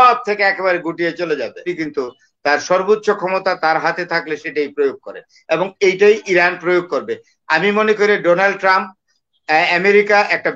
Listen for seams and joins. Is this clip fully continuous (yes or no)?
no